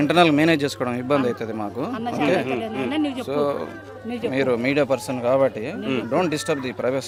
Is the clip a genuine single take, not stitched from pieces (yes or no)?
yes